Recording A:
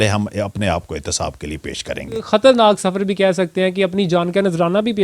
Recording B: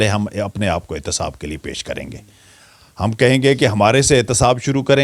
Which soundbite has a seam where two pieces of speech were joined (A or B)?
A